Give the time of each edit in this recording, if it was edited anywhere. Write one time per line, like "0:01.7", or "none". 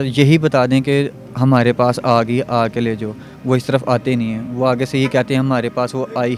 none